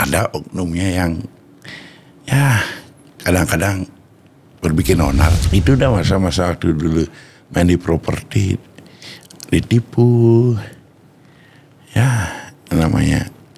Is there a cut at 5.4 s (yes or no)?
yes